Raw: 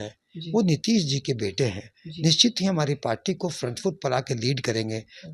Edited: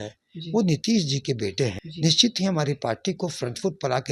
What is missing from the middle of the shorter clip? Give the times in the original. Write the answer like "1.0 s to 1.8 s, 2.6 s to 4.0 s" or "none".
1.8 s to 2.1 s